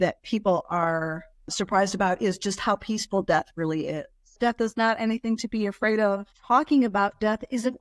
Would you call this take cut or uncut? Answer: cut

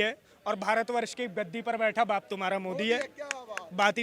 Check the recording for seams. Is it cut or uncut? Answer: uncut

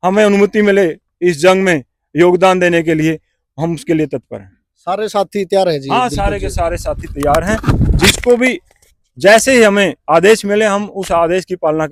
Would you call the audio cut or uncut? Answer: uncut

